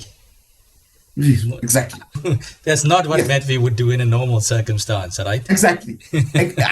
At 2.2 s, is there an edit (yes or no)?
yes